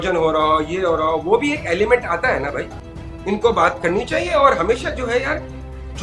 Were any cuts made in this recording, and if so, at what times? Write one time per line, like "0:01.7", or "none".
0:02.8

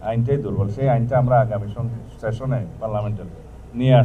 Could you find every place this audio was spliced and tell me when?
none

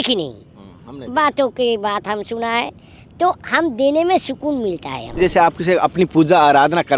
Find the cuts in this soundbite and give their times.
0:05.2

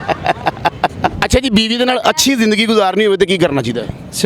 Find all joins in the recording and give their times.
0:01.2

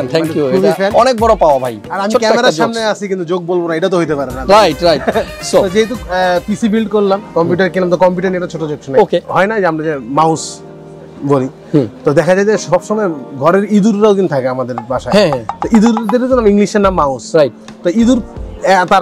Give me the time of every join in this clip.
0:01.8
0:09.3

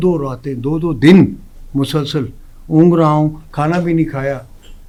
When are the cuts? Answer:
none

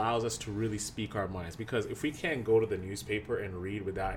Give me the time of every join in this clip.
none

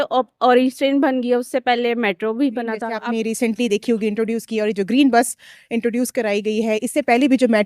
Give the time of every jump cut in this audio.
0:02.9

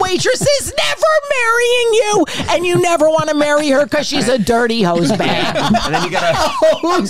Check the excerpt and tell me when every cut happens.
none

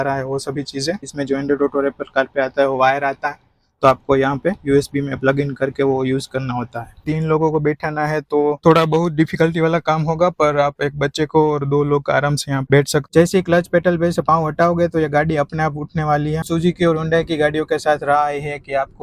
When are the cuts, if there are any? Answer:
0:01.1
0:07.0
0:13.1
0:16.4

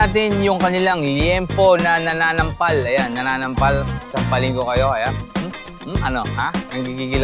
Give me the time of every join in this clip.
none

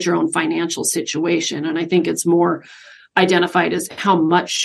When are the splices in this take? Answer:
none

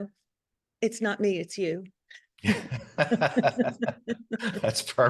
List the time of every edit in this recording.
none

